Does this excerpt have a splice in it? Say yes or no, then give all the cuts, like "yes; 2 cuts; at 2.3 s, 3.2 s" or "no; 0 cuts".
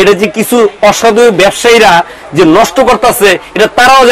no; 0 cuts